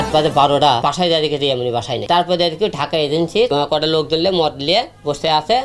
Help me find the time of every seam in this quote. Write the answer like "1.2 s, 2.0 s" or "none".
0.8 s, 2.0 s, 3.5 s